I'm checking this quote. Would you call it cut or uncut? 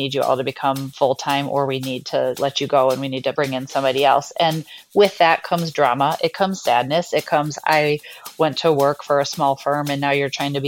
cut